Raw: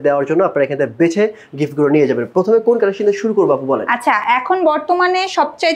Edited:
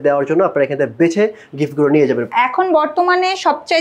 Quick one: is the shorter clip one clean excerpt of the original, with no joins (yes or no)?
no